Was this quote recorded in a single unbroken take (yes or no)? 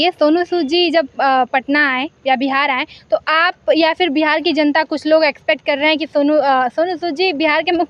yes